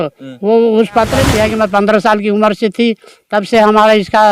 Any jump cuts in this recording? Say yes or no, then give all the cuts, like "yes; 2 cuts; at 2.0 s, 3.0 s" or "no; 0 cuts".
yes; 1 cut; at 1.3 s